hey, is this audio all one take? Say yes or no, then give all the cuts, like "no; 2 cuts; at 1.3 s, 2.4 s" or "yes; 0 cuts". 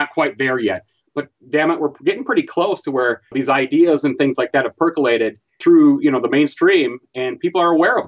yes; 0 cuts